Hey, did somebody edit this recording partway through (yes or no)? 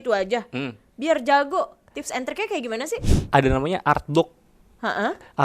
yes